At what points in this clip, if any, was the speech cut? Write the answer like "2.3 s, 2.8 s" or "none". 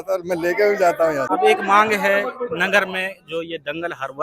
1.2 s